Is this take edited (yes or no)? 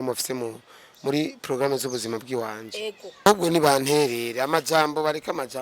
yes